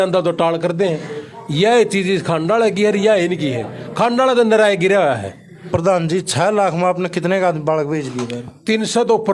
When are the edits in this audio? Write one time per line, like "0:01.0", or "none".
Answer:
0:05.7